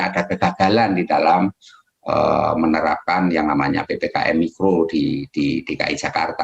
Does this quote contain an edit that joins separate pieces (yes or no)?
no